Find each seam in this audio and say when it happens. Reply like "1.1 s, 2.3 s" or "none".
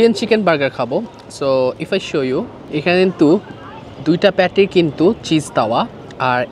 none